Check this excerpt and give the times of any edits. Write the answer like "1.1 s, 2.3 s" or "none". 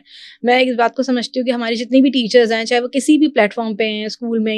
none